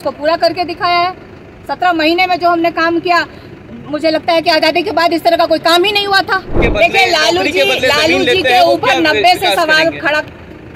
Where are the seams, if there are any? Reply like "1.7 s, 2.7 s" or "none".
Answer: 6.6 s